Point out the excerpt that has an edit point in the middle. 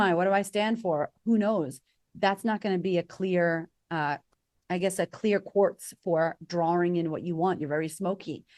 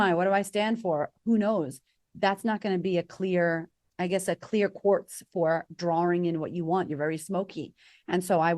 second; 1 cut; at 3.8 s

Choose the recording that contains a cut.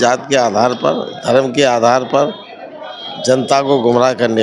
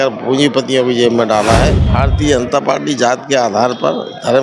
second; 1 cut; at 1.8 s

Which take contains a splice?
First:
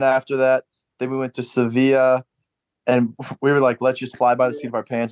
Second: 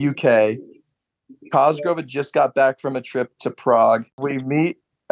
second; 1 cut; at 4.2 s

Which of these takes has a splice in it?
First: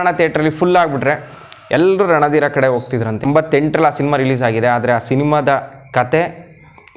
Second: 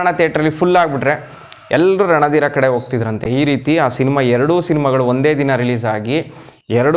first; 1 cut; at 3.2 s

